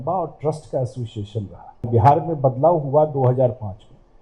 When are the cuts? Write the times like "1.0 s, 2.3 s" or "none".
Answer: 1.9 s

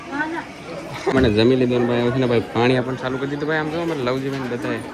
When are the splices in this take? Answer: 1.1 s

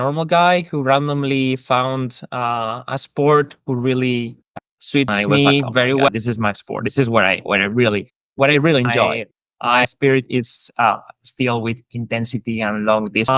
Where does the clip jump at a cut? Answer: 6.1 s, 9.8 s

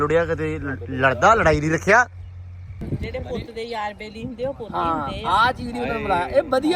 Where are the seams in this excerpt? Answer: 2.8 s

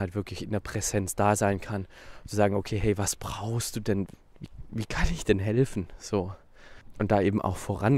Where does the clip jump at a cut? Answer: 4.1 s, 6.8 s

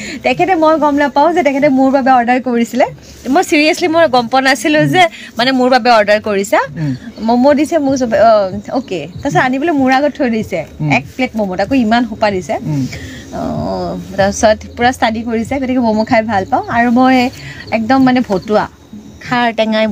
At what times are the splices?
none

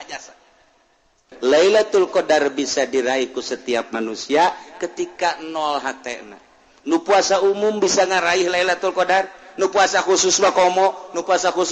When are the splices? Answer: 1.2 s

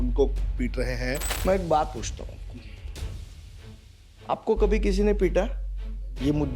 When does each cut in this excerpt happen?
1.3 s

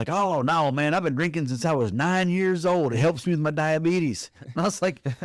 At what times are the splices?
none

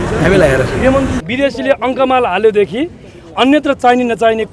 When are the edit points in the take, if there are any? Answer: 1.2 s

